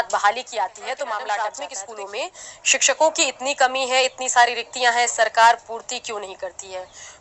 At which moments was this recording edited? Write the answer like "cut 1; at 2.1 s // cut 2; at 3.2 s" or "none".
cut 1; at 1.8 s